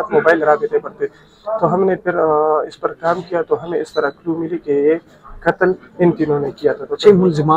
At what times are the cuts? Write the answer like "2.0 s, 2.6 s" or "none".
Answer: none